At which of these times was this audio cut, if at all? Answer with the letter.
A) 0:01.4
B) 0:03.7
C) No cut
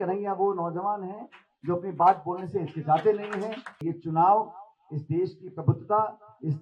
B